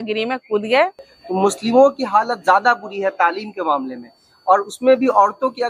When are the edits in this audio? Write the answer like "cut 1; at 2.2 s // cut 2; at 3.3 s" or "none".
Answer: cut 1; at 1.1 s